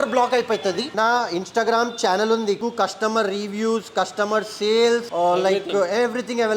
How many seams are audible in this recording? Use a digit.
2